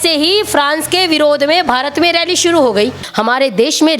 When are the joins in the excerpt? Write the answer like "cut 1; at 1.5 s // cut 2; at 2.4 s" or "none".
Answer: cut 1; at 3.0 s

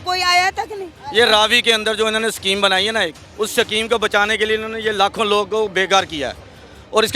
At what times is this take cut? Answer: cut 1; at 0.9 s

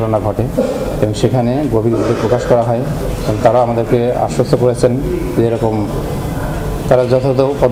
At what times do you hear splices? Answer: none

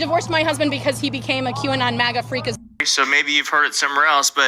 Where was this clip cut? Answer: cut 1; at 2.6 s

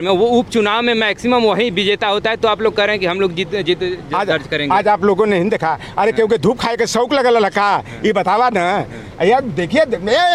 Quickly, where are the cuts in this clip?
none

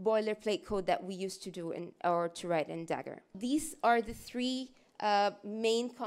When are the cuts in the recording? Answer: cut 1; at 3.3 s

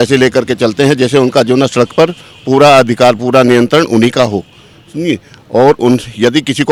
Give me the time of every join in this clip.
none

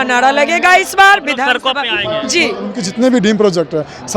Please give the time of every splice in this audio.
cut 1; at 2.8 s

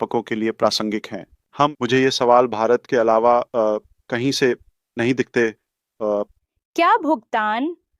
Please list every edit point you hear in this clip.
cut 1; at 1.7 s // cut 2; at 6.4 s

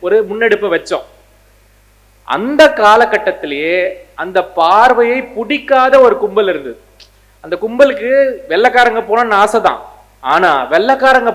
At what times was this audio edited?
none

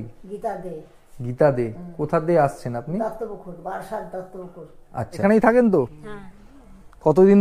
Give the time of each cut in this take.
cut 1; at 5.2 s

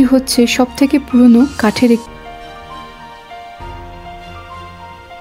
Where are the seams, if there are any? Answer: cut 1; at 2.0 s

